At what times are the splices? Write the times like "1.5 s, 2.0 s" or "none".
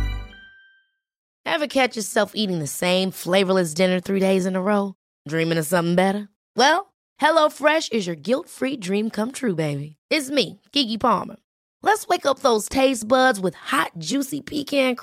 1.2 s